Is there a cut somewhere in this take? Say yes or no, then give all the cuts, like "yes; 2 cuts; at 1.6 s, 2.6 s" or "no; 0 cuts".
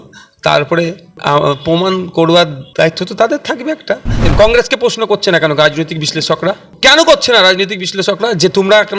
yes; 3 cuts; at 2.6 s, 4.3 s, 6.7 s